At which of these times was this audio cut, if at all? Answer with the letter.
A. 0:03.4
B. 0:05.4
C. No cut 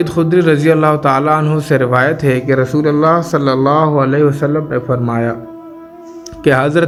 C